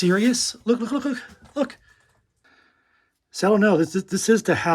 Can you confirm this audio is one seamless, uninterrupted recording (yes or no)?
no